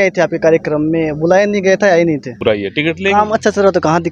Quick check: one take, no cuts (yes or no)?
no